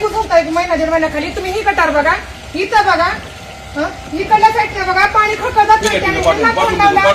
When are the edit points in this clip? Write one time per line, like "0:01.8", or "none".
none

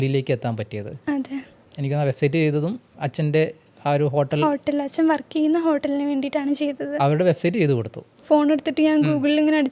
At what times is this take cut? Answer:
0:01.6
0:02.9
0:08.2

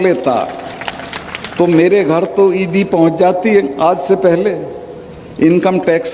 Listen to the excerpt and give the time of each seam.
none

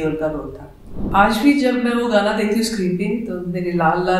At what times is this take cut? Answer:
0:01.0

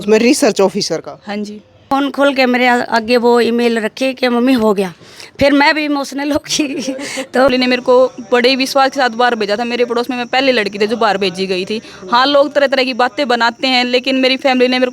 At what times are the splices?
0:01.8
0:07.5

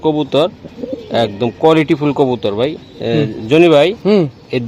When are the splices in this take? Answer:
none

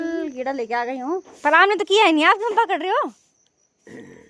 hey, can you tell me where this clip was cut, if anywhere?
0:01.3

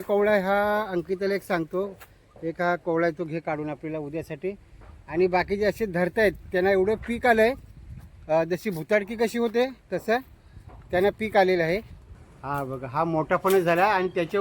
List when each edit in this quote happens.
0:12.0

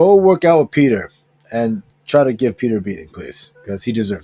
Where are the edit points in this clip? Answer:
none

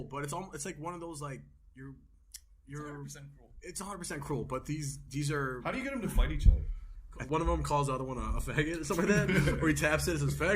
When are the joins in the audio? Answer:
0:07.1

